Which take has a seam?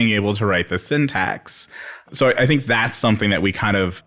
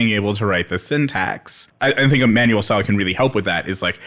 second; 1 cut; at 1.7 s

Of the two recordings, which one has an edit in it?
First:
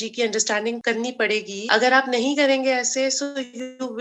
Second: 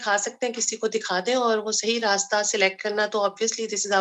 first; 1 cut; at 1.1 s

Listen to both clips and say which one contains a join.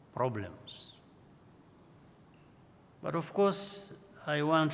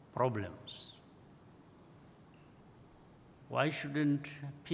second; 1 cut; at 2.6 s

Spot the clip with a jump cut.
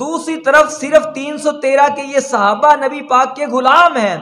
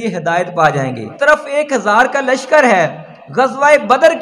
second; 1 cut; at 1.1 s

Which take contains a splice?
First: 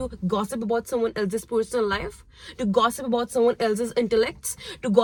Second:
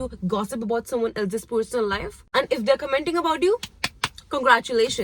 second; 1 cut; at 2.2 s

